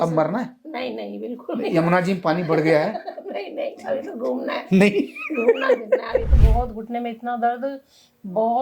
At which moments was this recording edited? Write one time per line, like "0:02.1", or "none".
0:06.4